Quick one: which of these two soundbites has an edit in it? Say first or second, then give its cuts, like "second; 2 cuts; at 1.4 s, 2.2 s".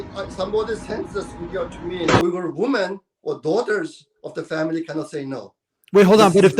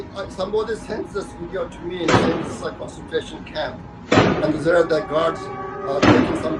first; 1 cut; at 2.2 s